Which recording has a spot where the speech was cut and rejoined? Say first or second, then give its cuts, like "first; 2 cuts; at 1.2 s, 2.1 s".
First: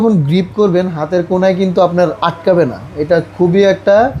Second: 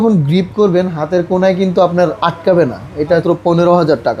second; 1 cut; at 3.2 s